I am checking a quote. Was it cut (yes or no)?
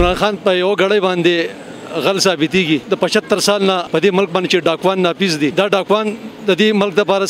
yes